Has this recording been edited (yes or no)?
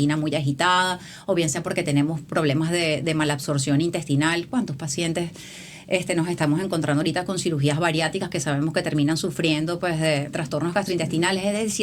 yes